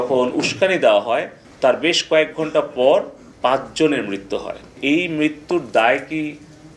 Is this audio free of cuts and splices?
no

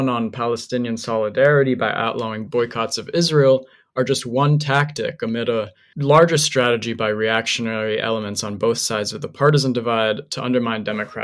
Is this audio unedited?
yes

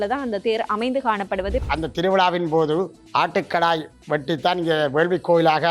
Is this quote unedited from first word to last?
no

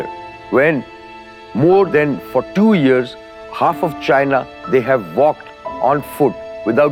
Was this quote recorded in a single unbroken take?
yes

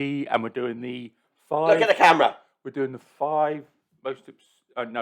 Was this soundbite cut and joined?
no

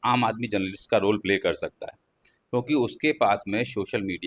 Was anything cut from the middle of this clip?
no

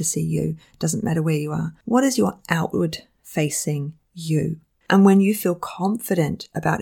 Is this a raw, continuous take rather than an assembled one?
no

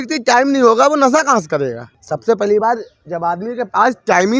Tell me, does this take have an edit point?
yes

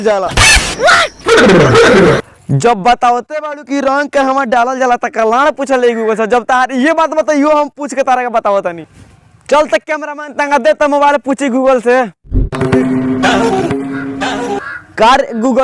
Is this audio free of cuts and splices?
no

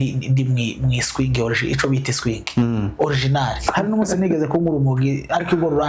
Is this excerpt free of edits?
no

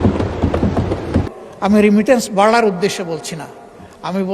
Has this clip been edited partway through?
yes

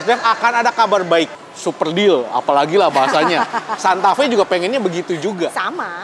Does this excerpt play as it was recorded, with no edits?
no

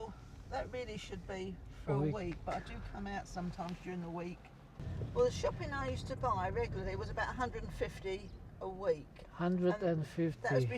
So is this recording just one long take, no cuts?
no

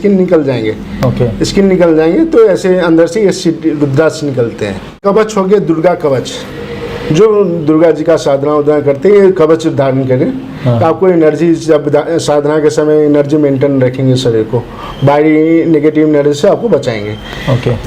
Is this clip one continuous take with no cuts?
yes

